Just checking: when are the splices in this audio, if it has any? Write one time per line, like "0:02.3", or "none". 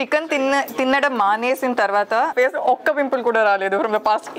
0:02.3